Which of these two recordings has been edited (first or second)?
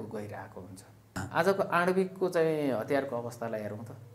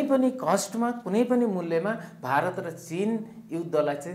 first